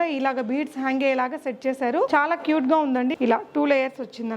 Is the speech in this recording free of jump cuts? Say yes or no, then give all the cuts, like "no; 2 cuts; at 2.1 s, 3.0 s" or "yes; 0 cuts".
no; 2 cuts; at 2.1 s, 3.1 s